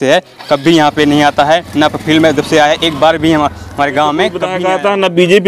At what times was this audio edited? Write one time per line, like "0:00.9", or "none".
0:04.5